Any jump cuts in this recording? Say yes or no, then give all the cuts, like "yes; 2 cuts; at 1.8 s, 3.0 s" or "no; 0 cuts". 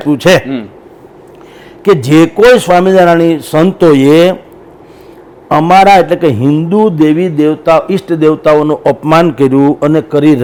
no; 0 cuts